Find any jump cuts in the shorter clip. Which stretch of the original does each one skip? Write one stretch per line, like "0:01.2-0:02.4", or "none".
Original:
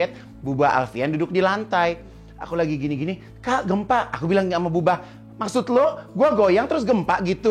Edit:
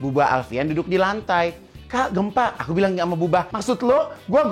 0:02.2-0:03.3
0:05.1-0:05.4